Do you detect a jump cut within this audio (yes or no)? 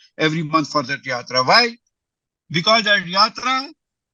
no